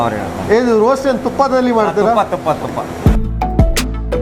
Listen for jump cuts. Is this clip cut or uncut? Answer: cut